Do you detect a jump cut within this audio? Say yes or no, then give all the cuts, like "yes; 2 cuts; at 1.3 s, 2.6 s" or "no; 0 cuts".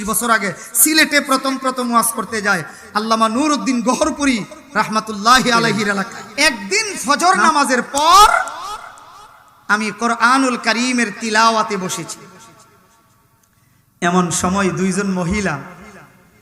yes; 1 cut; at 6.2 s